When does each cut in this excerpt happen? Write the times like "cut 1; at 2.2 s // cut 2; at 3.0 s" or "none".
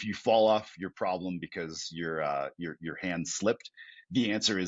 none